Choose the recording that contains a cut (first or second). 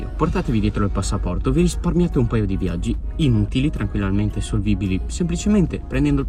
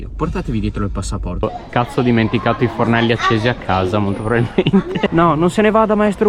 second